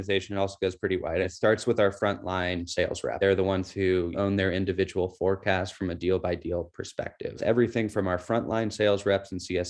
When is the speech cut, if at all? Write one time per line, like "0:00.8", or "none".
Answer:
0:01.3
0:03.1
0:04.1
0:07.4